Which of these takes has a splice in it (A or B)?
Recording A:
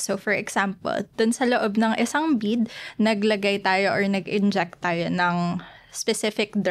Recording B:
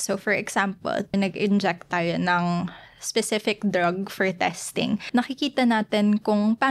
B